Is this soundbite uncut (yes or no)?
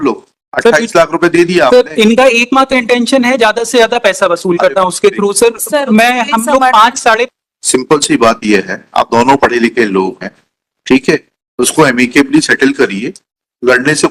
no